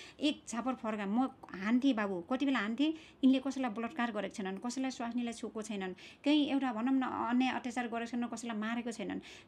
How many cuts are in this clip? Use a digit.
0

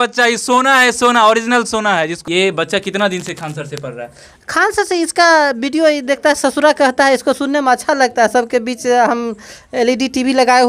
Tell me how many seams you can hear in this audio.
1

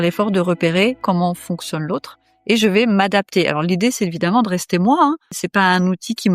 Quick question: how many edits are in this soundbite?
2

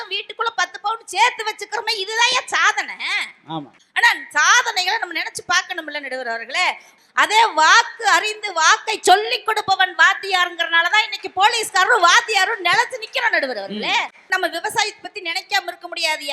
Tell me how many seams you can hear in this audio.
2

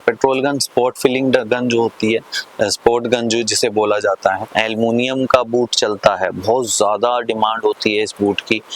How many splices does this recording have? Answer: 1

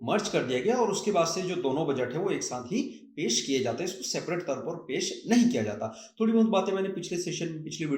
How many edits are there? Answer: 0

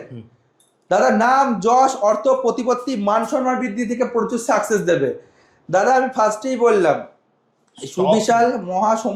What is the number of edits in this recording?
0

